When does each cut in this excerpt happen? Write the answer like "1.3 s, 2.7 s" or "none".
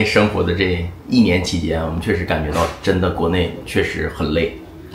none